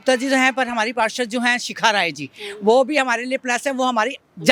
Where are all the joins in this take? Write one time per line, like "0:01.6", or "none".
none